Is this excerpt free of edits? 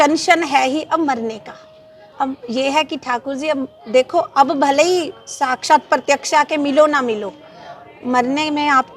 yes; 0 cuts

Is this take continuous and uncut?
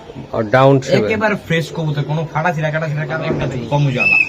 no; 1 cut; at 3.2 s

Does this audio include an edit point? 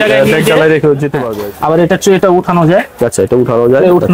yes; 1 cut; at 1.3 s

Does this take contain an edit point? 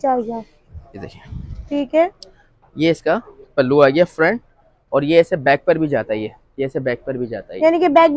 no; 0 cuts

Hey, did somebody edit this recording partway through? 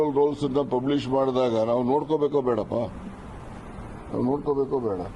yes; 1 cut; at 4.2 s

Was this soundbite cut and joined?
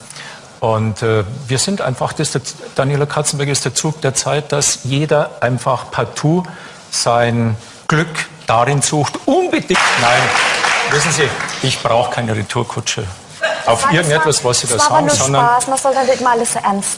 no; 0 cuts

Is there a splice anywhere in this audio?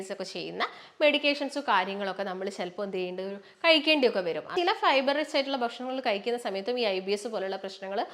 yes; 1 cut; at 4.5 s

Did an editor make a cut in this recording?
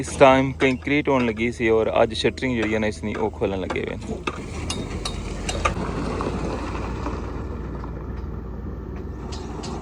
yes; 1 cut; at 5.8 s

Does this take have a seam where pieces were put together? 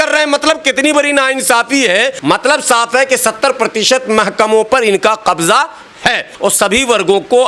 yes; 2 cuts; at 2.2 s, 6.3 s

